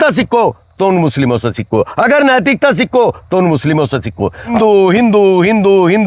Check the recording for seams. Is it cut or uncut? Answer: cut